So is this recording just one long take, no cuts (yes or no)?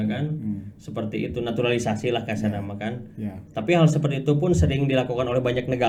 yes